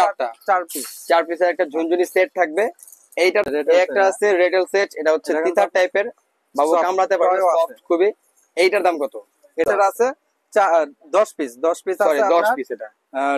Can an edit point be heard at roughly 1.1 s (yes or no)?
no